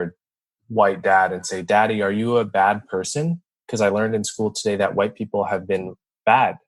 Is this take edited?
no; 0 cuts

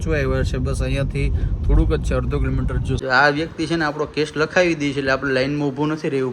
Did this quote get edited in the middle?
yes; 1 cut; at 2.9 s

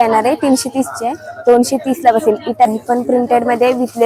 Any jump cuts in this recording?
yes; 1 cut; at 2.7 s

